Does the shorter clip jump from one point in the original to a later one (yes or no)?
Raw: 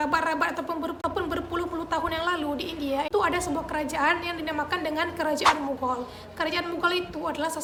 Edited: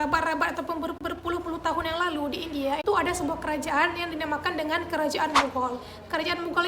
yes